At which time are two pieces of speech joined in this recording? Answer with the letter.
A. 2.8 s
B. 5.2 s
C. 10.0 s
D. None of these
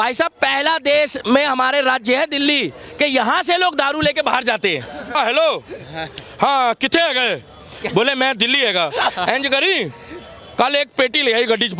B